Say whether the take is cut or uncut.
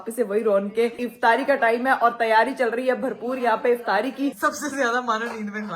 cut